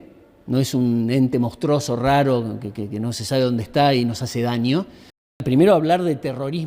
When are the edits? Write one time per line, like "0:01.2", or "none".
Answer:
0:05.4